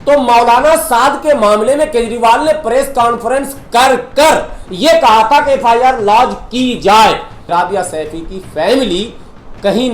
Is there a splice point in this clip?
yes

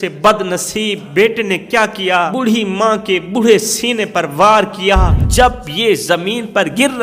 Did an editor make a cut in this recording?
yes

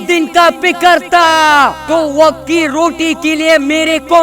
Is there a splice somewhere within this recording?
no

